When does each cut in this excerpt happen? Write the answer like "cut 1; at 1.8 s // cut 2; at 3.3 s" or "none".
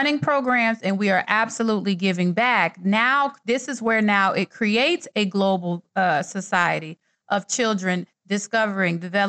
none